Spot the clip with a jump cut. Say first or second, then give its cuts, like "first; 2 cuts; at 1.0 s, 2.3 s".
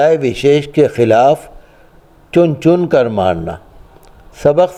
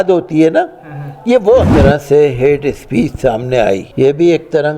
second; 2 cuts; at 1.7 s, 3.9 s